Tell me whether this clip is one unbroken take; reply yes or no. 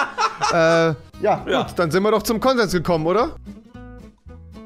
no